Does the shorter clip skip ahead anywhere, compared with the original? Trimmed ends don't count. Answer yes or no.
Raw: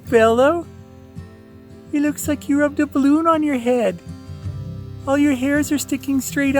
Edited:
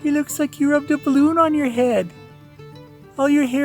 no